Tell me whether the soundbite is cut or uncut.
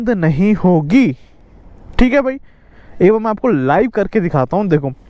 uncut